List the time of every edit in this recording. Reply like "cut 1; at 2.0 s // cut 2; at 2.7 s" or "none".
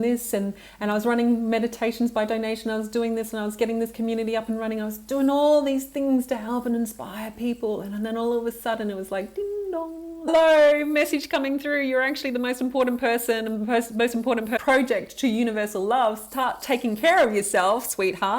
cut 1; at 10.3 s // cut 2; at 14.6 s